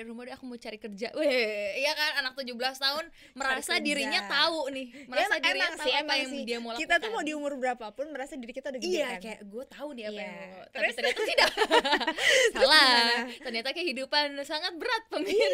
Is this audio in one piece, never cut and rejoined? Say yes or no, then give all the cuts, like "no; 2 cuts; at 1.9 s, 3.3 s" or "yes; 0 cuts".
yes; 0 cuts